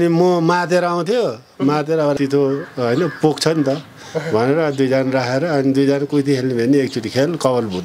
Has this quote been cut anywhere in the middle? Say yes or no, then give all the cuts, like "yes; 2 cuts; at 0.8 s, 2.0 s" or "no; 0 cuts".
yes; 1 cut; at 2.2 s